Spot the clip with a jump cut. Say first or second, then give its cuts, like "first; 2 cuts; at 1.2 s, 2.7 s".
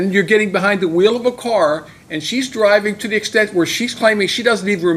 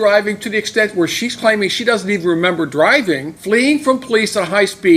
second; 1 cut; at 3.3 s